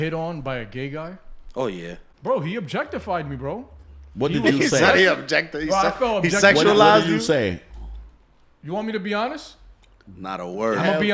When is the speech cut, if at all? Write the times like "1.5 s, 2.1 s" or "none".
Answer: 2.0 s